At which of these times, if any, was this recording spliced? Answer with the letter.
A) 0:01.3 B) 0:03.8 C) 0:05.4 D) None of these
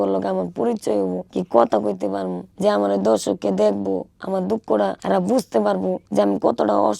D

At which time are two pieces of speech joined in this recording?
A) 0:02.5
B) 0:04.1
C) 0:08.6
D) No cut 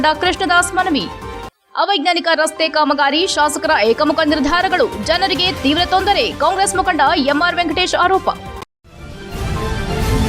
C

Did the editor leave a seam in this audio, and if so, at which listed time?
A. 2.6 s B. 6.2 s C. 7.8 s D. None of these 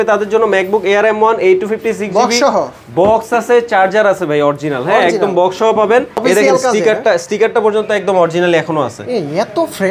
B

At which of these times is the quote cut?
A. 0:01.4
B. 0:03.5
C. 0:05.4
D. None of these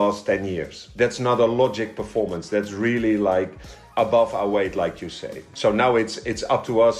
C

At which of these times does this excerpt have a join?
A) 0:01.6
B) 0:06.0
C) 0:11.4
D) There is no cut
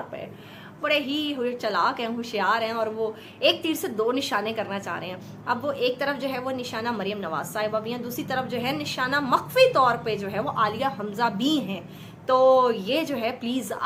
D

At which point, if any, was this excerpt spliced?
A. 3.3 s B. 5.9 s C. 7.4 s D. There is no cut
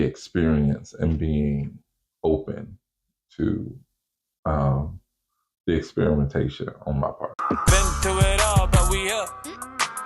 C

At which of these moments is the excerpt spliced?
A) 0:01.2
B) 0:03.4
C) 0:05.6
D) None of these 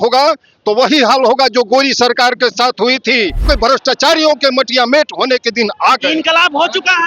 B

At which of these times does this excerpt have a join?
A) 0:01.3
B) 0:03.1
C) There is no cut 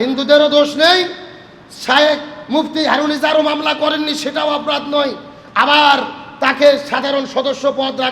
C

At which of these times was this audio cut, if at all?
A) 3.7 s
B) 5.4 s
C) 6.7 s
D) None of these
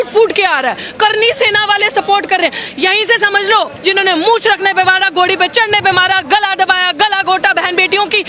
A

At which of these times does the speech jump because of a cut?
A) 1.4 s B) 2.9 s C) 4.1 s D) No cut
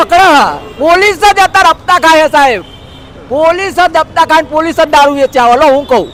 D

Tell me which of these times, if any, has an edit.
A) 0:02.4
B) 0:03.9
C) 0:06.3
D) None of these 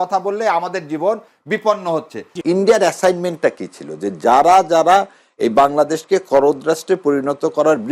A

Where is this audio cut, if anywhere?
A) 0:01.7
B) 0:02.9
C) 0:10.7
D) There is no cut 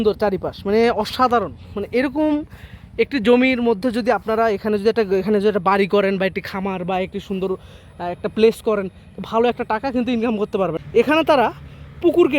C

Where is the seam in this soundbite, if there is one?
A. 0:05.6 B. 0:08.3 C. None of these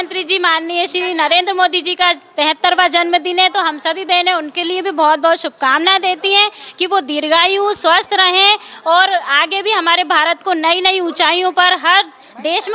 C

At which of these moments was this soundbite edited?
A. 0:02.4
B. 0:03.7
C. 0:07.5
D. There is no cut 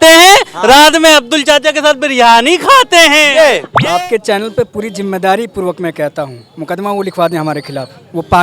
B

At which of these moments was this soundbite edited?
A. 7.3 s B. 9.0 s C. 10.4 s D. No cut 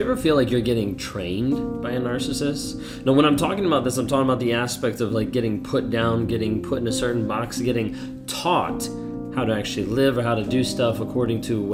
D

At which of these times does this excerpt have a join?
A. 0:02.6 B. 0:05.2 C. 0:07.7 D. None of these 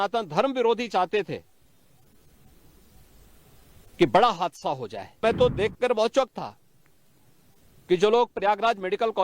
B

